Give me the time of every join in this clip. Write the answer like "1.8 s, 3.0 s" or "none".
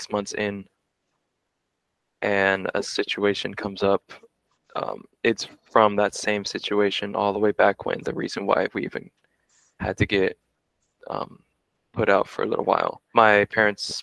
13.0 s